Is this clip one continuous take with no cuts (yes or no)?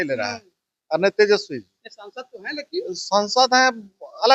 yes